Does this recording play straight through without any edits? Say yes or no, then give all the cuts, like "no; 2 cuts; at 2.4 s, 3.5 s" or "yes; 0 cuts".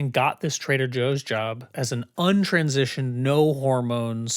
yes; 0 cuts